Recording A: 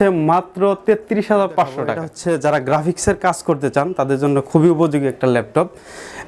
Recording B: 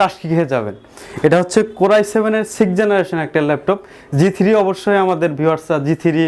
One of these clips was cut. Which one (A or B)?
A